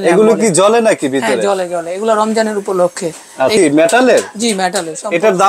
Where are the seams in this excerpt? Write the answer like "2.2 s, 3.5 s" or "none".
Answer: 3.6 s